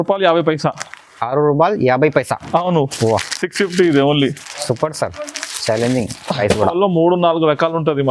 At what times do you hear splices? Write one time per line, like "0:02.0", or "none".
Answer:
0:06.7